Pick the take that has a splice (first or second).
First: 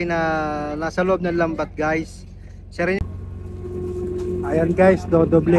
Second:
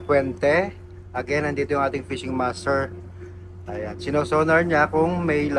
first